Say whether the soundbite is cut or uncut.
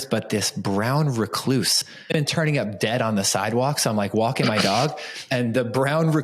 cut